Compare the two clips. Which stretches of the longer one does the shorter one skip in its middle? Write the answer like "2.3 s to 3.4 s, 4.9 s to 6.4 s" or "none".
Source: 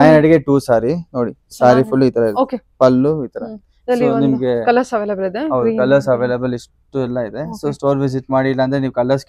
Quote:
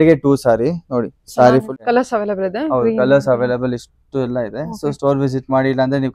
1.9 s to 4.5 s